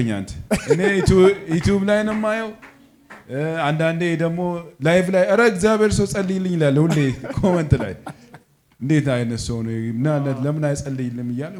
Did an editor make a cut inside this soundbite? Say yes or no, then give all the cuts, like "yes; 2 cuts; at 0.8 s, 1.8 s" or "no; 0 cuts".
no; 0 cuts